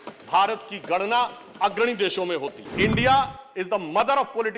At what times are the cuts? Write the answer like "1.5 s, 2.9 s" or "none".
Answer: 2.6 s